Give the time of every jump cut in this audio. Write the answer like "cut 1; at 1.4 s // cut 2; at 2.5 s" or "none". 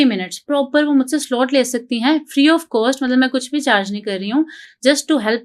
none